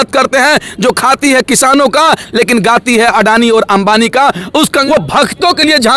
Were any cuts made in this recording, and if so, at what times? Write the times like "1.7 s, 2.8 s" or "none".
4.8 s